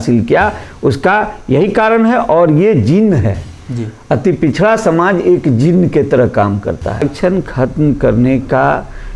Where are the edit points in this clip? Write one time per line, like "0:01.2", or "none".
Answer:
0:07.1